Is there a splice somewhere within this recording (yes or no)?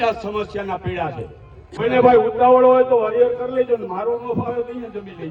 yes